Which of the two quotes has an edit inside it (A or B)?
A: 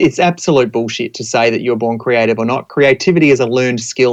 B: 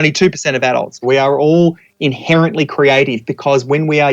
B